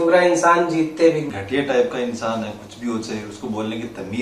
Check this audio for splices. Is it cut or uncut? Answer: cut